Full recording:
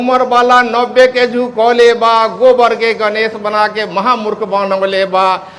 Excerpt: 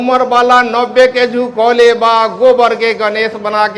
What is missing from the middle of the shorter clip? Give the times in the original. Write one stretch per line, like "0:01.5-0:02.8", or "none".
none